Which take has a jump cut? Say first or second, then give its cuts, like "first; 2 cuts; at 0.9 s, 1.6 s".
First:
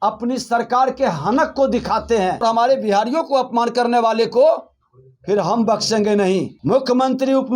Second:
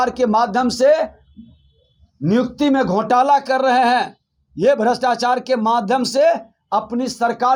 first; 2 cuts; at 2.4 s, 6.5 s